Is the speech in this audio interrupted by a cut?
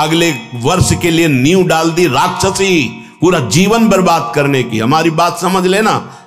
no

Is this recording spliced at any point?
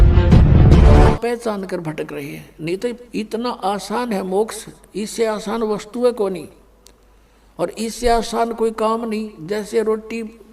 yes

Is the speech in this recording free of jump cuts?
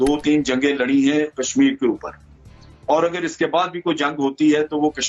yes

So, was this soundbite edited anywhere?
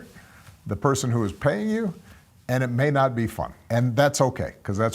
yes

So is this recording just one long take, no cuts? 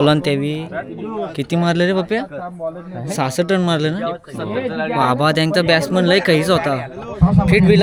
yes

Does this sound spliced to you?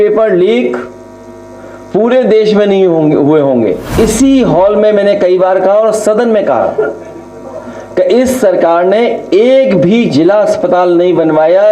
yes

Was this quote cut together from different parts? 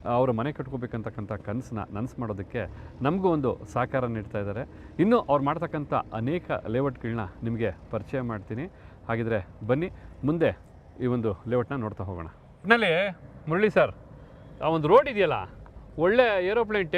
no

